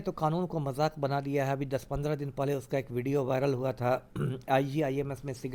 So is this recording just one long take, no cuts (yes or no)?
yes